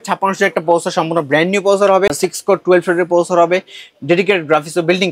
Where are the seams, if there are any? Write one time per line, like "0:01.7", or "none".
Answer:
0:02.1